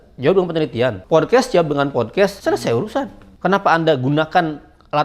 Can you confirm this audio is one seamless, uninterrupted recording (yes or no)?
no